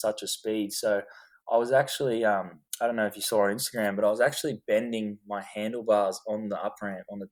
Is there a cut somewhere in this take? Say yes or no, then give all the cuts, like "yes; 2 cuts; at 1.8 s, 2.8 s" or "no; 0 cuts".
no; 0 cuts